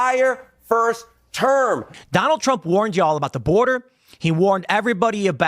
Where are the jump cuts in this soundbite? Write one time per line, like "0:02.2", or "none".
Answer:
0:01.9